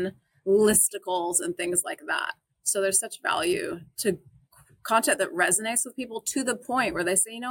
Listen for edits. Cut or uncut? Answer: uncut